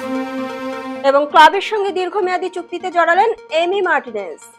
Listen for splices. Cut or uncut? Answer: cut